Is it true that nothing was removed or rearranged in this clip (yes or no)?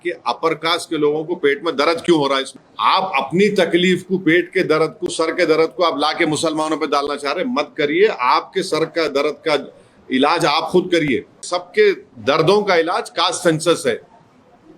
no